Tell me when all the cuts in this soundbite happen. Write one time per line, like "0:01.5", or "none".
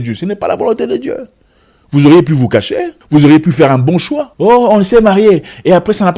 0:02.9